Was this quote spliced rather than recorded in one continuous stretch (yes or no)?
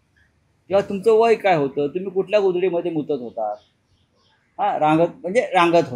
no